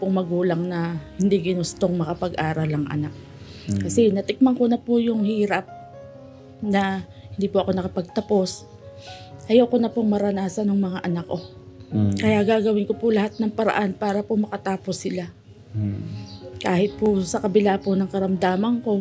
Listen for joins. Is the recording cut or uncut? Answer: uncut